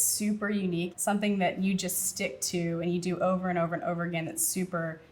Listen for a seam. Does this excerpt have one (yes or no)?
yes